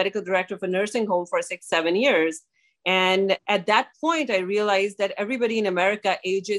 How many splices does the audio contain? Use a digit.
1